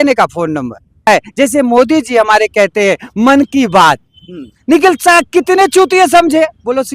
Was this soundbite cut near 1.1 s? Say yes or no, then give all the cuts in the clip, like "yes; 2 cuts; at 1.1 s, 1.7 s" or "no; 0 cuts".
yes; 1 cut; at 1.1 s